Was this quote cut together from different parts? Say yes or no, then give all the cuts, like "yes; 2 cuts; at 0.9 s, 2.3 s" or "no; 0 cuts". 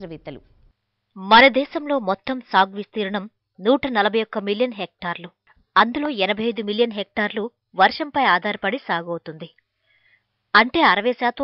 yes; 1 cut; at 6.8 s